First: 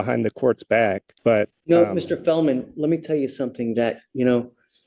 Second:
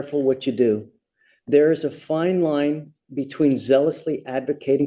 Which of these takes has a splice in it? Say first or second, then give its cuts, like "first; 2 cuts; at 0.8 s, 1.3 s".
first; 1 cut; at 1.1 s